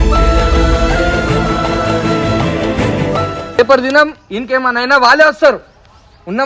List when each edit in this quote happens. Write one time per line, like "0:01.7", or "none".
0:03.6